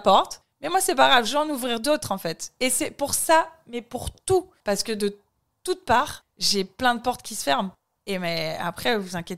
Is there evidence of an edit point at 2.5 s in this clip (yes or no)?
no